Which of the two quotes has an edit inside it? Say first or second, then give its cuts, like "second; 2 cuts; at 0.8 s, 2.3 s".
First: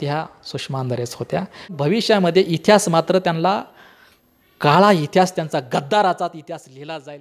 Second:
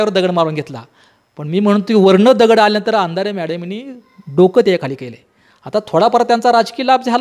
first; 1 cut; at 1.7 s